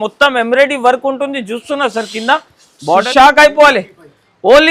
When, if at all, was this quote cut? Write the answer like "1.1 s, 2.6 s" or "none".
3.1 s